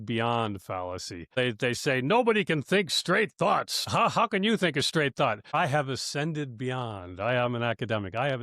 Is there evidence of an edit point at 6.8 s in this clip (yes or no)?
no